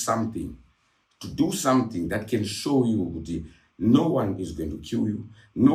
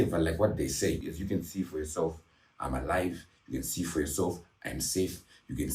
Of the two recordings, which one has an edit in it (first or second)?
second